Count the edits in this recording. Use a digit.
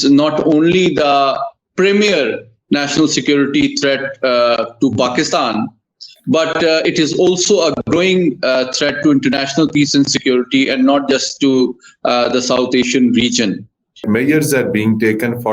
1